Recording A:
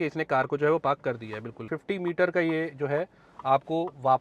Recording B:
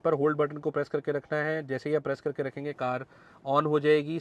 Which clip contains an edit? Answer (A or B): A